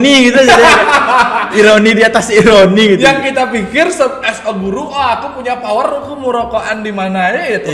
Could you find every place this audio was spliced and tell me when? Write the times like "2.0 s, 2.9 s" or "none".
none